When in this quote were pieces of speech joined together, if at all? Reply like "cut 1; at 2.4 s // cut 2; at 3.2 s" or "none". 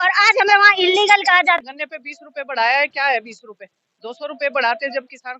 cut 1; at 1.6 s